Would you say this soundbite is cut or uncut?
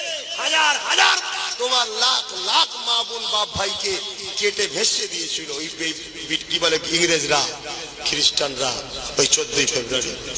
uncut